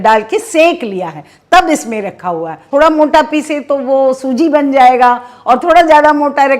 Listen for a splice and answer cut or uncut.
cut